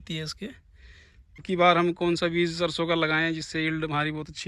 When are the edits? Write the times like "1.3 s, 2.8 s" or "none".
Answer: 1.4 s